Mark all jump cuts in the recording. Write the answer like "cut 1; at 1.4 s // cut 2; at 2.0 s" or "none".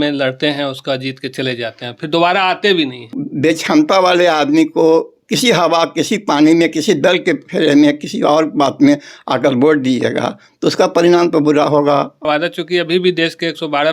cut 1; at 3.2 s // cut 2; at 12.2 s